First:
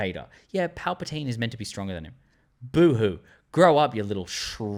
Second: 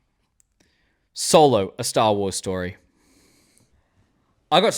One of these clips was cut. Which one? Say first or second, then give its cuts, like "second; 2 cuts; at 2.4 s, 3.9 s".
second; 1 cut; at 3.8 s